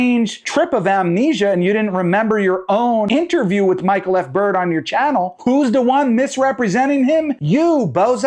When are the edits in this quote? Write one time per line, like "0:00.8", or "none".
0:03.1